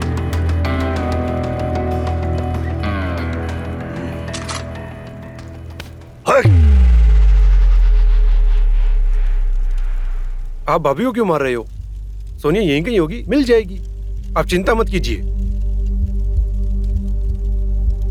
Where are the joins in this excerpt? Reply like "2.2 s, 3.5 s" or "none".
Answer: none